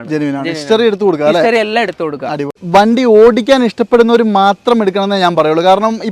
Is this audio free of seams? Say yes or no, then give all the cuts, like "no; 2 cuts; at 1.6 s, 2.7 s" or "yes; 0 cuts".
no; 1 cut; at 2.6 s